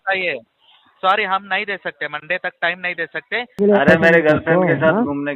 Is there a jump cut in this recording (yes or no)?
yes